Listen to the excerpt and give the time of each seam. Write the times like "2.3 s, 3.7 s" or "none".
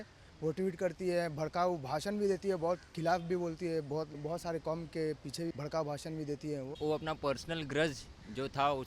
4.2 s, 5.5 s, 6.7 s